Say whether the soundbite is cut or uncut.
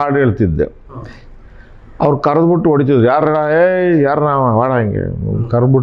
uncut